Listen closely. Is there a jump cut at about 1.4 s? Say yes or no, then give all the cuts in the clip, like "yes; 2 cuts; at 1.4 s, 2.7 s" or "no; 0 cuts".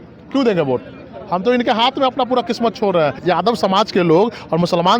no; 1 cut; at 3.2 s